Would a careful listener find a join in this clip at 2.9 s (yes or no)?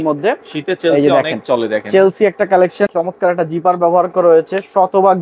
yes